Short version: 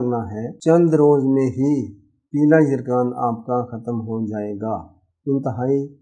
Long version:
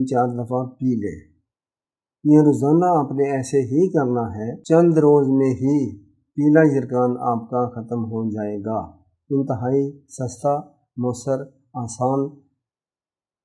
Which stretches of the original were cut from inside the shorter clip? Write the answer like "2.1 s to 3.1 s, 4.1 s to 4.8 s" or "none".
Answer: none